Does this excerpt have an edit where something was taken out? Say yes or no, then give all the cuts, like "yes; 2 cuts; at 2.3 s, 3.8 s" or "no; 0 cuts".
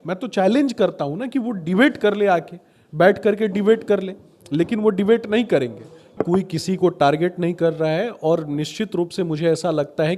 yes; 1 cut; at 6.1 s